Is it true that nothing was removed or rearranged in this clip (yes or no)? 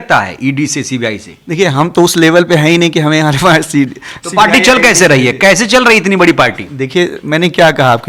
yes